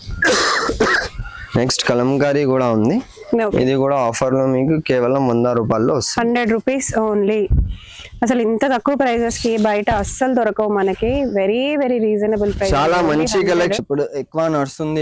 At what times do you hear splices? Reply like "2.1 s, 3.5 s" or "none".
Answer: 13.8 s

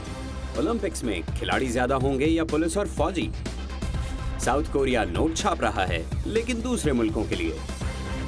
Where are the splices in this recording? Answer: none

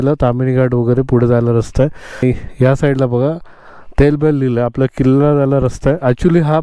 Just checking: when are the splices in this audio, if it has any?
2.2 s

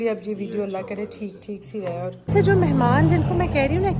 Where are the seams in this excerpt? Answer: 2.3 s

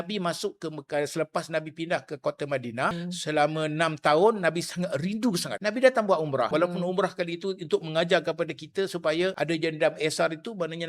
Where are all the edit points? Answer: 3.0 s, 5.5 s, 6.5 s, 9.3 s

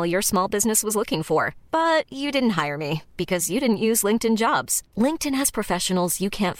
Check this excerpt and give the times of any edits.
none

